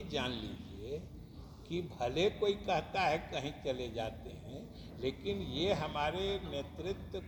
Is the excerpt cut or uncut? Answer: uncut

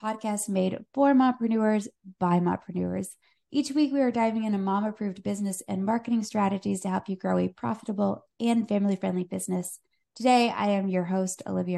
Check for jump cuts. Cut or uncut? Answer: uncut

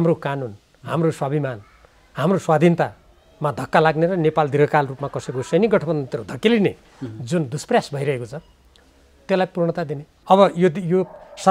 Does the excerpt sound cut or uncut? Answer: cut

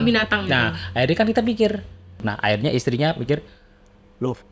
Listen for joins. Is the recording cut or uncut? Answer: cut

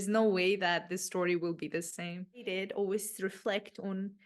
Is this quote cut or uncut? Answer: cut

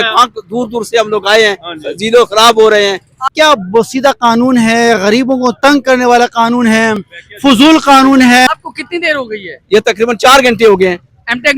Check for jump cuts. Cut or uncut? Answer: cut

